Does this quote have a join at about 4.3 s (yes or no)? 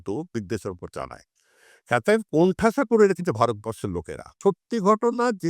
yes